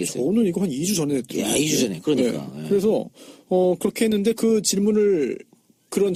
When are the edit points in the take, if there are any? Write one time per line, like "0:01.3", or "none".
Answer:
none